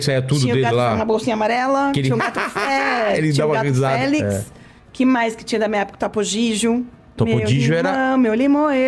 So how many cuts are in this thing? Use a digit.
0